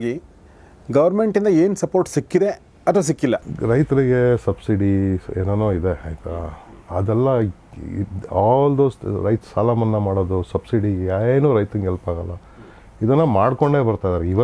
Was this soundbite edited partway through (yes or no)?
yes